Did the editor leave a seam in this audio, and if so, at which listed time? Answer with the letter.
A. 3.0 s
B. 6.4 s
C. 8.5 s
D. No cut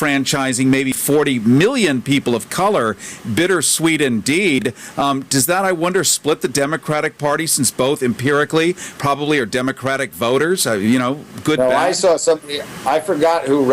B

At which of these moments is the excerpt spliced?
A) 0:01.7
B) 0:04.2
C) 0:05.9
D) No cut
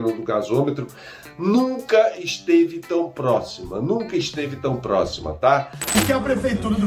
C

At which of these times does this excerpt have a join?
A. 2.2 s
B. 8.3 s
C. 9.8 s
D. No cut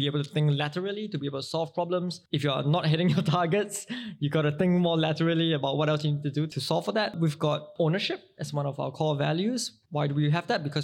A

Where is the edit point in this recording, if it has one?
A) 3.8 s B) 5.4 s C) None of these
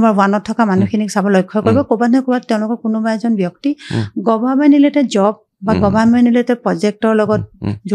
C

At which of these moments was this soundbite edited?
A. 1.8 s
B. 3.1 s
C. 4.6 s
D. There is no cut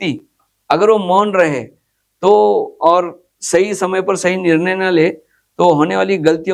D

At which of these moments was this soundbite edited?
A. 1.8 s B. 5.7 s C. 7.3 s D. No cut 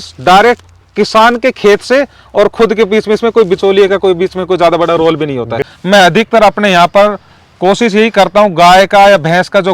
B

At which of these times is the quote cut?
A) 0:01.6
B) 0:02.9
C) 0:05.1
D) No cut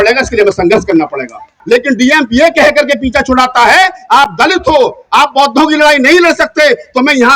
A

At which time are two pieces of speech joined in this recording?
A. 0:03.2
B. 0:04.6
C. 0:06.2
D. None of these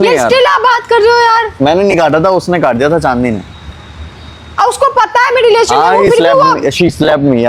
D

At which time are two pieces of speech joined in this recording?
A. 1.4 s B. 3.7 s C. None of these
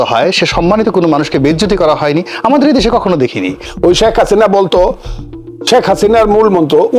B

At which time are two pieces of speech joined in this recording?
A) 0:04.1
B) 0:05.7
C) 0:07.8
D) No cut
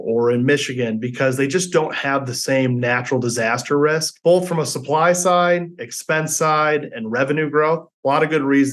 A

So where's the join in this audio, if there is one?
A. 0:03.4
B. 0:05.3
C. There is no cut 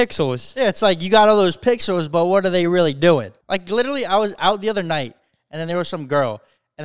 A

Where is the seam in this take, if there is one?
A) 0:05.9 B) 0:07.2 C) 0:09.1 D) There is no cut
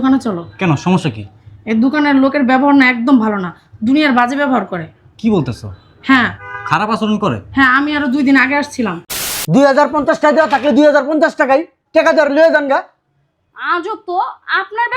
C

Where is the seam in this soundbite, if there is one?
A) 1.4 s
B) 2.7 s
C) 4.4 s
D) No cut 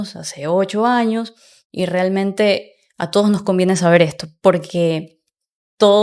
D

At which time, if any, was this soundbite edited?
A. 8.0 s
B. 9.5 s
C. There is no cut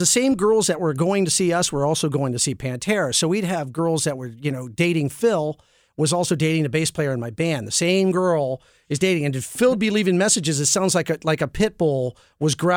B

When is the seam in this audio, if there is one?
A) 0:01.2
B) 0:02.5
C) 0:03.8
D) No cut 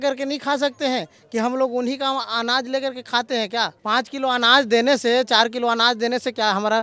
C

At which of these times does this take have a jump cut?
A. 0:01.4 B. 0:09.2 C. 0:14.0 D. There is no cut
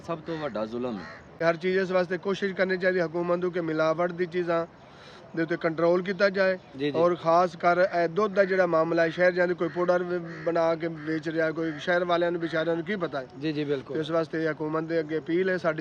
A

